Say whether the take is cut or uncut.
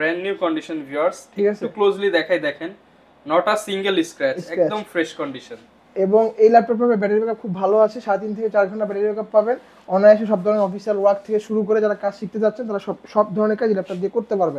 uncut